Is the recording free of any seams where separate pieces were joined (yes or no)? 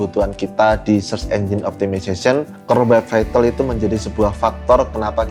yes